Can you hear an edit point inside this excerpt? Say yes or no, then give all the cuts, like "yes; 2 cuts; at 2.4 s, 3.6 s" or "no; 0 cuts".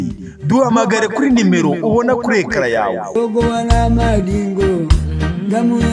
no; 0 cuts